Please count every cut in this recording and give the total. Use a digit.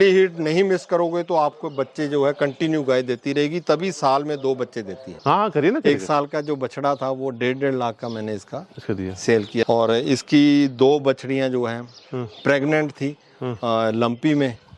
2